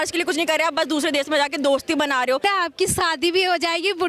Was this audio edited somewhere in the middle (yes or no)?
yes